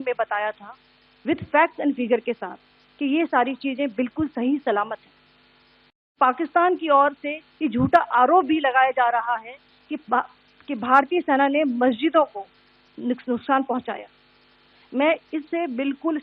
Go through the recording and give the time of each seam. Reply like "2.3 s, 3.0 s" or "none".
6.1 s